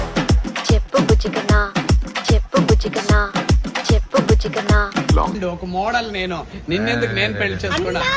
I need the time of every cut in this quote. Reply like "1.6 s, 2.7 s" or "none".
5.4 s